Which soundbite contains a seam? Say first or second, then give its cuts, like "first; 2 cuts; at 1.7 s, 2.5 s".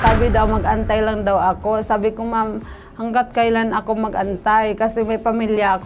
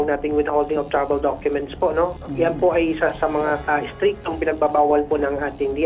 second; 1 cut; at 2.1 s